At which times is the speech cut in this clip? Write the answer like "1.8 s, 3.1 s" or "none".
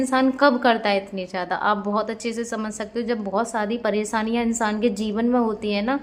none